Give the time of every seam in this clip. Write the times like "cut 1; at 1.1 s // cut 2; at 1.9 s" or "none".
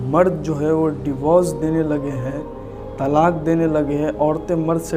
none